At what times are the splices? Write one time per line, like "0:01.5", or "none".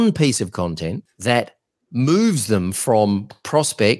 0:01.1

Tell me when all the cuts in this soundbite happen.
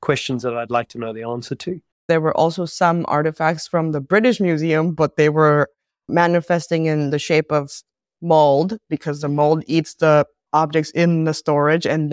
0:02.0

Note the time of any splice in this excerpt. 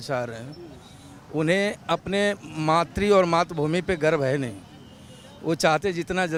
none

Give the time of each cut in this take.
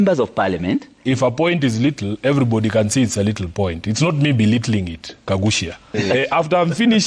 0:00.9
0:06.0

